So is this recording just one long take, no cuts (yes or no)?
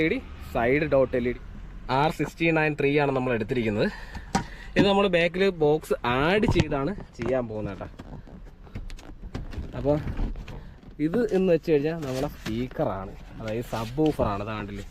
no